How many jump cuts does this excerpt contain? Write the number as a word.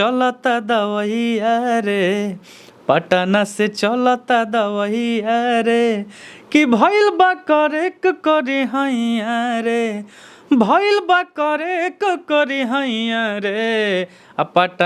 zero